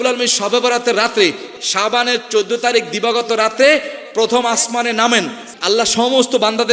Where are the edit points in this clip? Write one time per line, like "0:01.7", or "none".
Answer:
0:01.5
0:05.5